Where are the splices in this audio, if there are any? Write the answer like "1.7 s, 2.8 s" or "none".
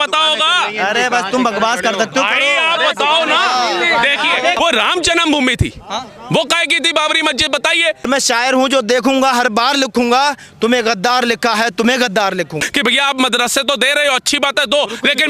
4.6 s, 8.1 s, 12.6 s